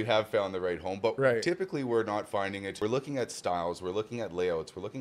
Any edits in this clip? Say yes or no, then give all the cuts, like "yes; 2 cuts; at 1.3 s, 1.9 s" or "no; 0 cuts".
yes; 1 cut; at 2.7 s